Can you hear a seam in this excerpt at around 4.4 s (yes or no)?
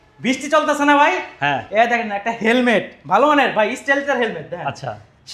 no